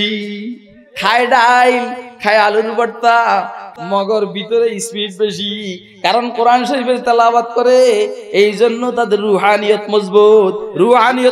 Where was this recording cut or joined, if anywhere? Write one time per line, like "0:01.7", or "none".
0:03.7